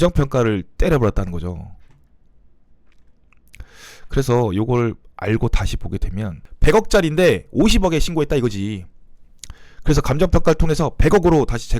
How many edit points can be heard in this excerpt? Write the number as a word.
one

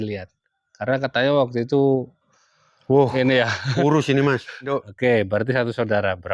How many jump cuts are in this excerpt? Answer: one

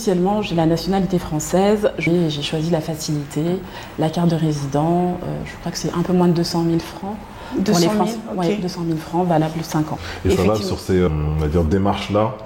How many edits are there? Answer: three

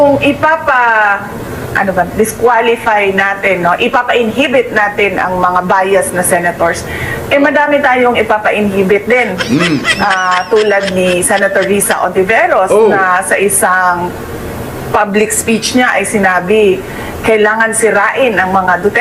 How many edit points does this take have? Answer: zero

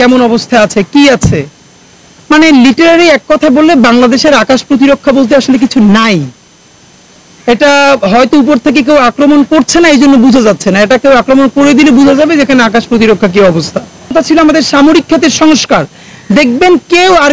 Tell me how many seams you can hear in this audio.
one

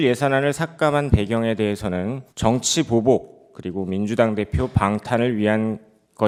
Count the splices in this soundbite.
zero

